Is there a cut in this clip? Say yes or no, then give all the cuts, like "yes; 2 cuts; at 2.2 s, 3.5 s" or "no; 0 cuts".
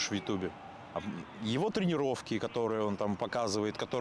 yes; 1 cut; at 0.9 s